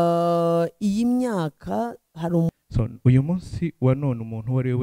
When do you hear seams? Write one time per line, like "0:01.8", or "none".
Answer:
0:02.5